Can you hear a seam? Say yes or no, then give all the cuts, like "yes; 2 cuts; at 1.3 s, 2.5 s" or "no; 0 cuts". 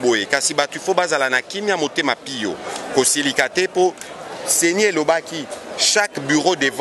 no; 0 cuts